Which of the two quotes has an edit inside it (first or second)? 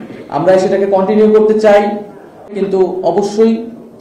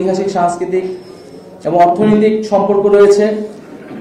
first